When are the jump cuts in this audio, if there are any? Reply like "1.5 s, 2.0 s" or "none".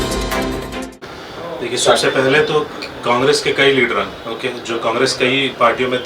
none